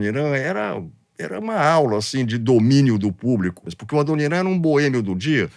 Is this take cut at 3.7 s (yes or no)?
yes